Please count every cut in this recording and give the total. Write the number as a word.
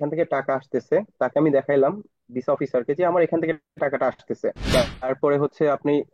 one